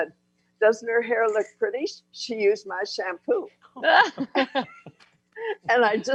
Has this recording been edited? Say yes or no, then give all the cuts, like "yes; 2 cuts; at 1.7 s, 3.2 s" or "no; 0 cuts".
no; 0 cuts